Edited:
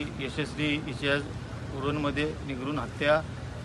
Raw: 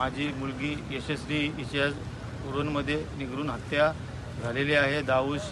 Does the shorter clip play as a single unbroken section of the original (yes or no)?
yes